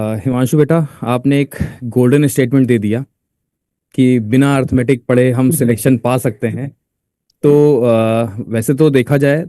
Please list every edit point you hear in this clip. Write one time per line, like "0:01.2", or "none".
none